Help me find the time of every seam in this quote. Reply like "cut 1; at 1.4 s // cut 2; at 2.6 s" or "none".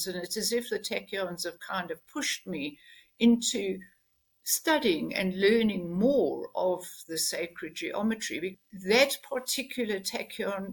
cut 1; at 8.5 s